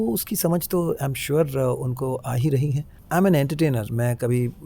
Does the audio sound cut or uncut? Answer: cut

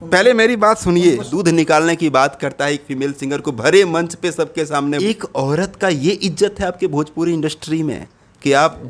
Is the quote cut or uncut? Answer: cut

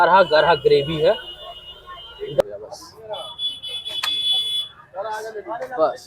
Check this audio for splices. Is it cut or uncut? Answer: cut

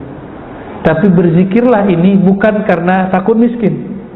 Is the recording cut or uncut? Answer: uncut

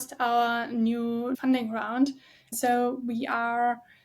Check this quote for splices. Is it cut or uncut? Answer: cut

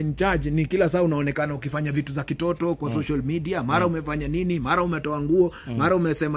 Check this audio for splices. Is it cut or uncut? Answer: uncut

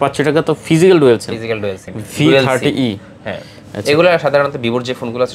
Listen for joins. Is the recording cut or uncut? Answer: cut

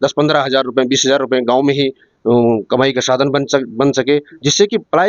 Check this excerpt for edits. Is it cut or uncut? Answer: uncut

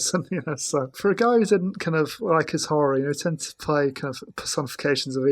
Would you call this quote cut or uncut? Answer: cut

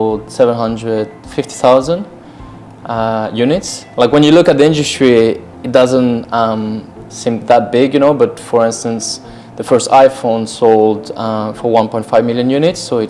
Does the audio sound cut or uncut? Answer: uncut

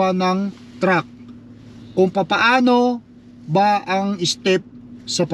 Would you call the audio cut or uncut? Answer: uncut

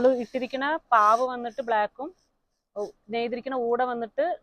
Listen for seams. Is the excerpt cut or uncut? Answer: uncut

